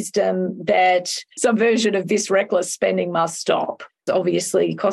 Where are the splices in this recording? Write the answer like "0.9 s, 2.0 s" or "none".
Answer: 1.3 s, 4.0 s